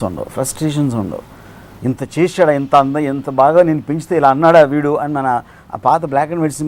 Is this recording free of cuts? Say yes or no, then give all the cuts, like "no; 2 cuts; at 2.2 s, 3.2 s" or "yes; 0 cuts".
yes; 0 cuts